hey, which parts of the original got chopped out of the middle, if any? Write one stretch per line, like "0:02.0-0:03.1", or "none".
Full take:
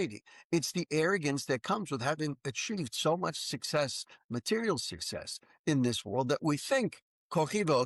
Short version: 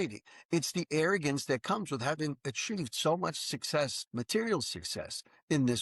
0:04.0-0:04.2